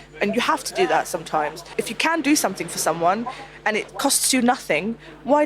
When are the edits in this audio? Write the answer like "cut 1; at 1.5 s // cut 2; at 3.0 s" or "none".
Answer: cut 1; at 1.7 s // cut 2; at 3.9 s

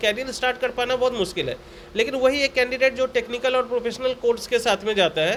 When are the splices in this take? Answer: none

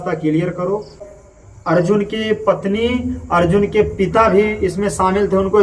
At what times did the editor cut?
cut 1; at 1.0 s

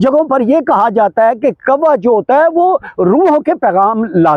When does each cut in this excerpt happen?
none

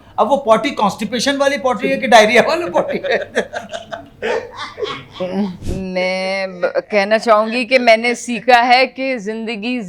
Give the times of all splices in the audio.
cut 1; at 5.6 s

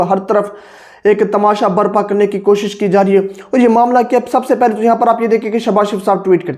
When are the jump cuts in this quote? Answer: none

